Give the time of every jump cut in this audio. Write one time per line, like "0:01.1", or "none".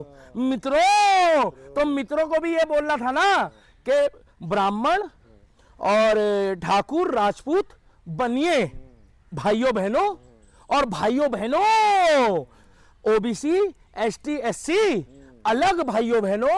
none